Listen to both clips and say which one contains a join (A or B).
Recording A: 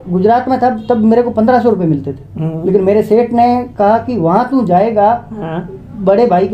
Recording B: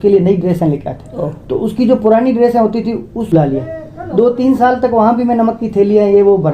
B